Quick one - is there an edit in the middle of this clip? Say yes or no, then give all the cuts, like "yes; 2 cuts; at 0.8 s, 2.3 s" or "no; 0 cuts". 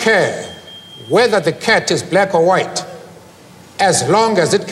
no; 0 cuts